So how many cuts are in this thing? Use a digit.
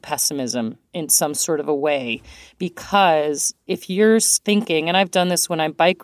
2